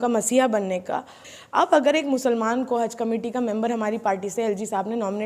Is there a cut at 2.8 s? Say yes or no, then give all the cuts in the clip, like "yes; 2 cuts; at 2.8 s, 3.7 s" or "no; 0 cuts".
no; 1 cut; at 1.3 s